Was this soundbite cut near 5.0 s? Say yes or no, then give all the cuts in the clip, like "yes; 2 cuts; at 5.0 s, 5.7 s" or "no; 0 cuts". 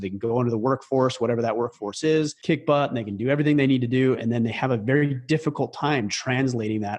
no; 1 cut; at 2.4 s